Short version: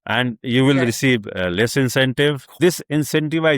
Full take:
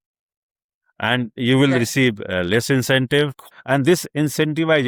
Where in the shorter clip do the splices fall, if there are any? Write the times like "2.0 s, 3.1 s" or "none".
2.6 s

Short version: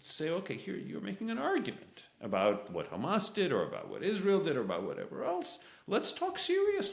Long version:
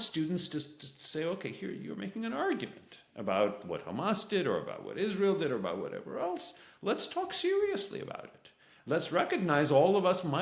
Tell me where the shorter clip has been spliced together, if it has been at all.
none

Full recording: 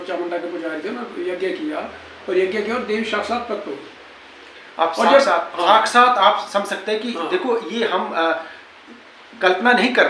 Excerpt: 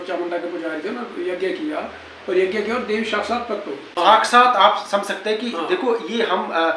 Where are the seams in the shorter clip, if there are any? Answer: 3.9 s

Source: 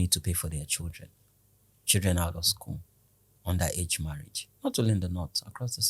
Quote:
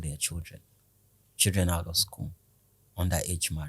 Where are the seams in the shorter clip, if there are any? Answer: none

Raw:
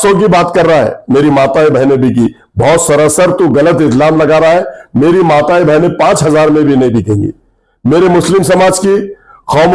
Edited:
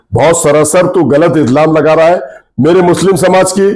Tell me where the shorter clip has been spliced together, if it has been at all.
2.3 s

